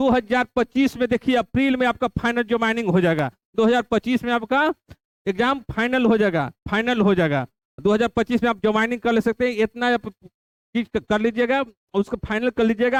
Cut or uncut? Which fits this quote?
uncut